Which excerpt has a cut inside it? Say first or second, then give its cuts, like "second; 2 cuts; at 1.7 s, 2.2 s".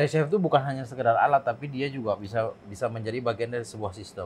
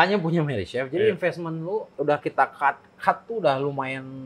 second; 1 cut; at 1.9 s